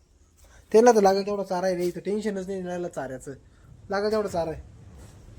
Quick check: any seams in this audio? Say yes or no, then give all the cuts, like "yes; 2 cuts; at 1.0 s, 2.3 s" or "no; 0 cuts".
no; 0 cuts